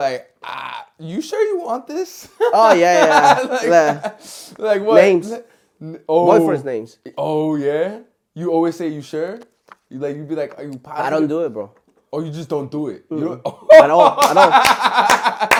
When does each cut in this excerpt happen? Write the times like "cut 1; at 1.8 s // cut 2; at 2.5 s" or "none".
none